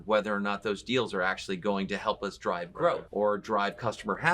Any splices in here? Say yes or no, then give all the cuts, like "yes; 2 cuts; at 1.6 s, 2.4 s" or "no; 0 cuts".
yes; 1 cut; at 3.0 s